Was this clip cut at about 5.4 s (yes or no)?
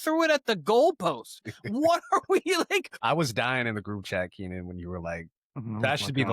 no